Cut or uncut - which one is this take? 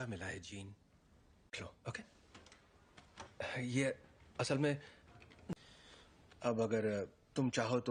uncut